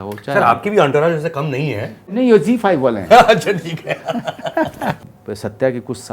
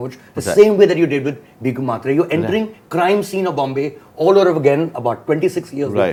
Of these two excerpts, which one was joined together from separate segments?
first; 2 cuts; at 2.1 s, 5.0 s

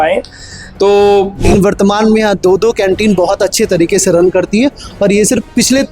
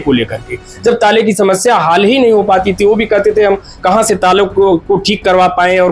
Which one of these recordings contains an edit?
first; 1 cut; at 1.5 s

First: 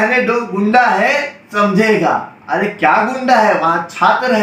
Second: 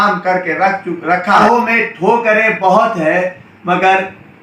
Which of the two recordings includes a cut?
second; 1 cut; at 1.4 s

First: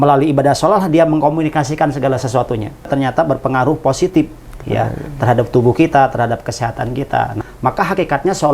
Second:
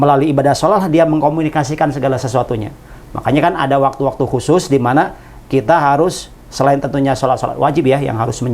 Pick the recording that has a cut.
first; 2 cuts; at 2.9 s, 7.4 s

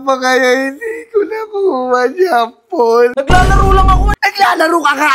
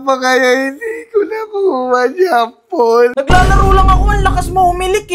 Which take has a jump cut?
first; 1 cut; at 4.1 s

